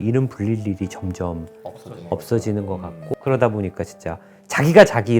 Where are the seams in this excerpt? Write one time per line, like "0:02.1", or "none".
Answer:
0:03.1